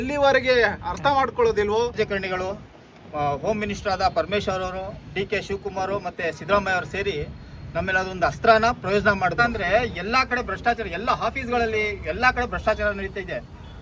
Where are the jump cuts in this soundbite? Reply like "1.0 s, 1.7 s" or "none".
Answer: 1.9 s, 9.4 s